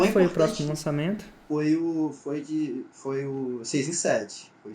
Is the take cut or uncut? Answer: cut